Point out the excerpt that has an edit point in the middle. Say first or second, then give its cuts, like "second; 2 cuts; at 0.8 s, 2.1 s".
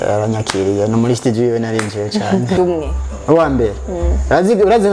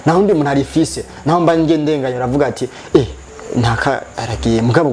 first; 1 cut; at 2.6 s